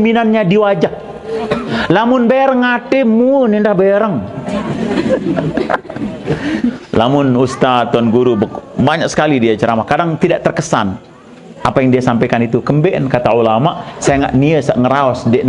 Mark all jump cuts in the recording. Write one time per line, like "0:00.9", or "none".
0:06.8

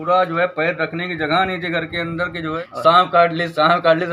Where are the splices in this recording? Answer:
0:02.6

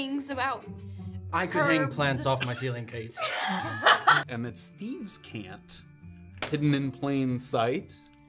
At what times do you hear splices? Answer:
0:04.3

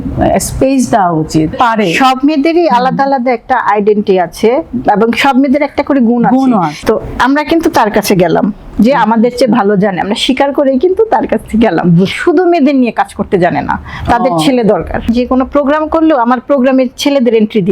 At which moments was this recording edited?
0:01.5
0:06.7
0:12.2
0:15.1

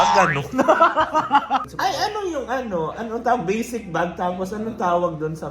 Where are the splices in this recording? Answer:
0:01.7

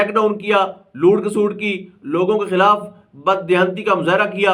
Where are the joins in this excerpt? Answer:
none

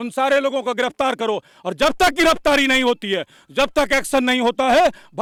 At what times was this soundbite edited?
none

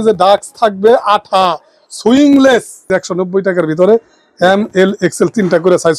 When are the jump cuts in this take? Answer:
0:02.9

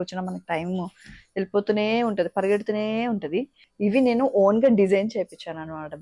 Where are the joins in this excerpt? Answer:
0:03.6

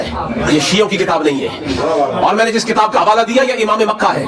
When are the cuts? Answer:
none

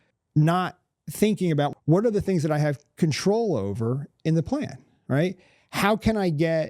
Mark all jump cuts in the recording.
0:01.7

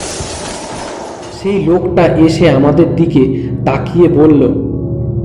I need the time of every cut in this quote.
0:01.2

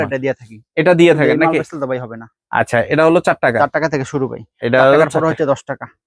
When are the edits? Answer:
none

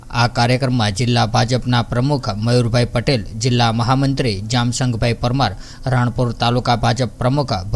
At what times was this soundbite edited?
0:01.0

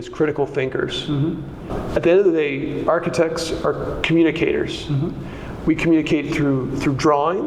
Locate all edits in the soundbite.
0:01.7

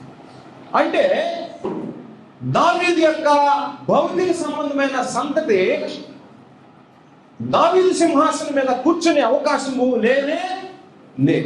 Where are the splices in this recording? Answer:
none

